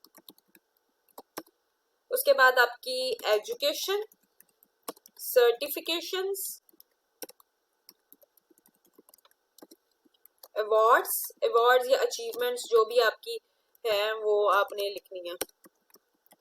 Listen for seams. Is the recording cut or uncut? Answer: uncut